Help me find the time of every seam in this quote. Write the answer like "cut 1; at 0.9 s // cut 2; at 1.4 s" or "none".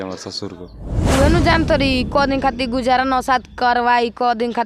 cut 1; at 1.1 s